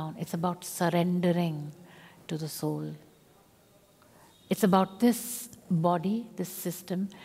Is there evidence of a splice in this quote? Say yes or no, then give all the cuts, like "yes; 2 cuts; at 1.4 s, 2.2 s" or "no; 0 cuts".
no; 0 cuts